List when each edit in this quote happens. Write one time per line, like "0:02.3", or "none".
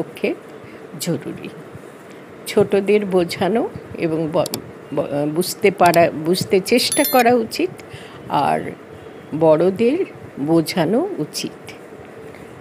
none